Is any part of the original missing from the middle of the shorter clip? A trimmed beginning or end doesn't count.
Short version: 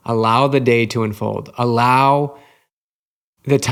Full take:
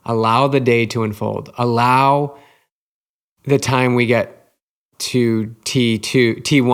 no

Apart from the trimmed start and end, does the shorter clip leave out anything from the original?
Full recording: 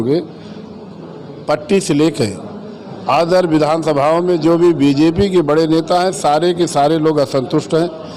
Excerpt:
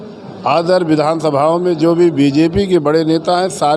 no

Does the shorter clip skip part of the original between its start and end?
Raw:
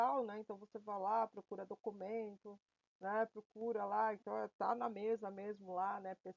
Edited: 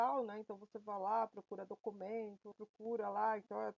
yes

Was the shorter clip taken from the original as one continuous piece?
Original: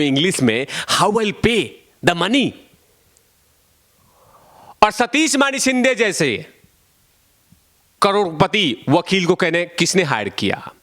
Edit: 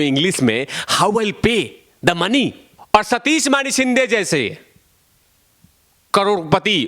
no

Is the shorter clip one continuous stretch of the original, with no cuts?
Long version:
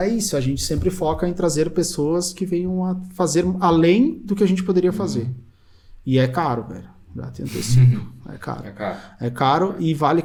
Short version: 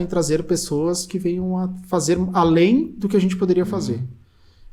yes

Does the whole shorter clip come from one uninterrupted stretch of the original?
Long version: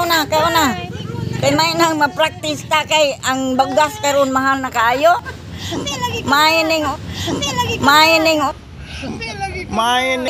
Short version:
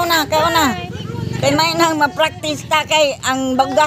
yes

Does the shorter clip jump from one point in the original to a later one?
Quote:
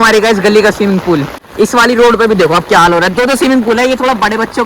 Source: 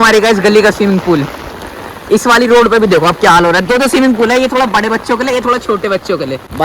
yes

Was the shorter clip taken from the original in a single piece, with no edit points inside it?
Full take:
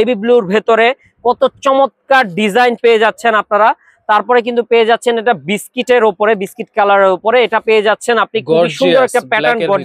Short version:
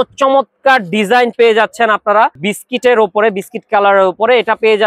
no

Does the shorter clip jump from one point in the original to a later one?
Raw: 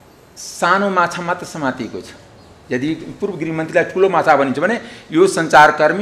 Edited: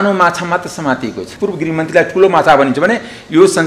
yes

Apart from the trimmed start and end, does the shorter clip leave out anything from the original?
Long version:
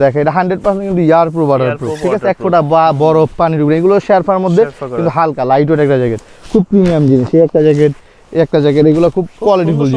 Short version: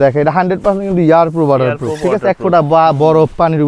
no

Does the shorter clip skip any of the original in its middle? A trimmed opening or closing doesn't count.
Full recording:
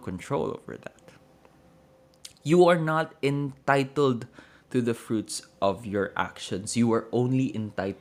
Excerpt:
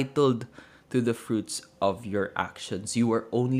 no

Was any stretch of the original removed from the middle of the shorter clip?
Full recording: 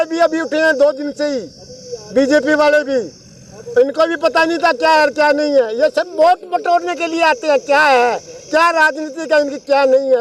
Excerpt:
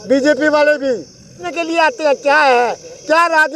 yes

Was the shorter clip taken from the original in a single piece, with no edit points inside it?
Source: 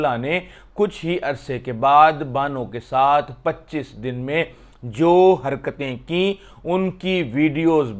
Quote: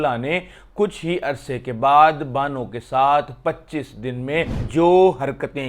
no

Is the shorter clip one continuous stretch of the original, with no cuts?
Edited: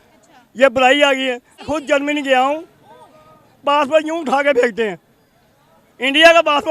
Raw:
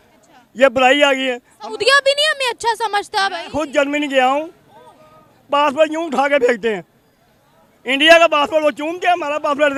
no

